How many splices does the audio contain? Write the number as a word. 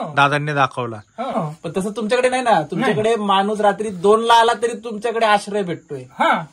one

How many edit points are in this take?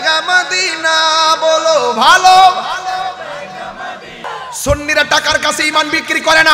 one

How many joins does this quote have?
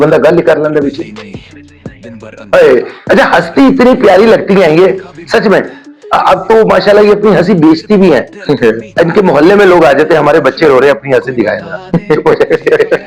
zero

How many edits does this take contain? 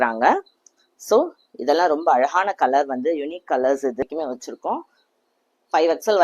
one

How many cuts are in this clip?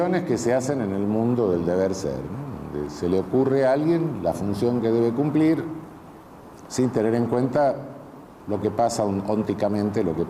one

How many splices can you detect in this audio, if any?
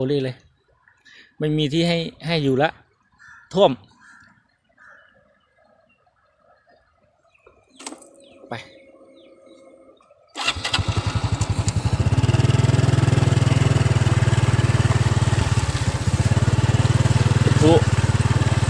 one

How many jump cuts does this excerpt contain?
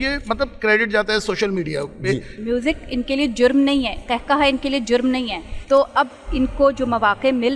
one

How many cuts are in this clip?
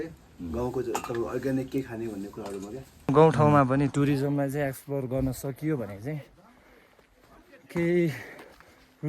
one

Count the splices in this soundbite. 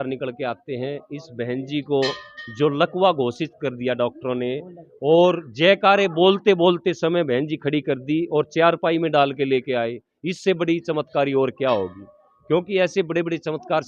zero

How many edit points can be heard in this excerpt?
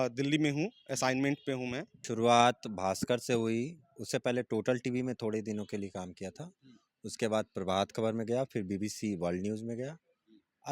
one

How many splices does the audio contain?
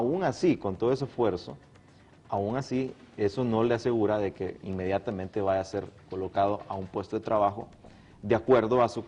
one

